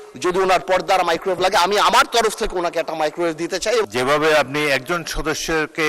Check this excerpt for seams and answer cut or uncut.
cut